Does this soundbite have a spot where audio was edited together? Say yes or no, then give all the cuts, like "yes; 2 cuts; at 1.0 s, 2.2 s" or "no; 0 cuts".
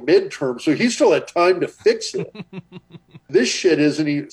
yes; 1 cut; at 3.2 s